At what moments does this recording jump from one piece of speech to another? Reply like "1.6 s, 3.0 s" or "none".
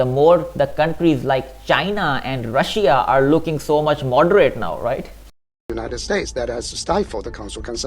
5.4 s